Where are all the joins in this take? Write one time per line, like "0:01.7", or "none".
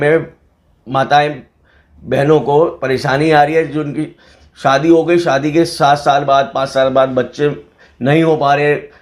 none